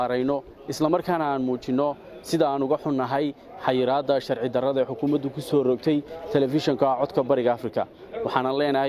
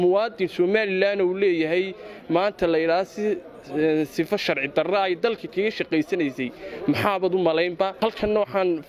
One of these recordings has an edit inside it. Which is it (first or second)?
second